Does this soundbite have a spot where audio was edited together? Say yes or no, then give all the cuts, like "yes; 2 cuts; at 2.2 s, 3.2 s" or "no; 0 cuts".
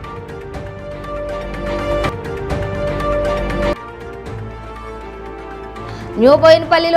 no; 0 cuts